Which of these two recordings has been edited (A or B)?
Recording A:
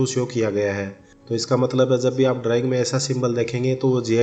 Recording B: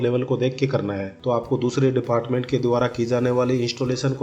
B